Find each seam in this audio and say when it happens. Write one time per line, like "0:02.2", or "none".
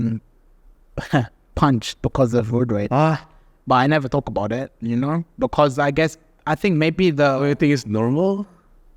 none